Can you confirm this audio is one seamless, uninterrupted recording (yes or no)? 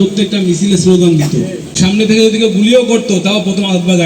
no